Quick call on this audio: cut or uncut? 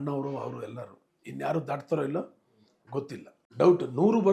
uncut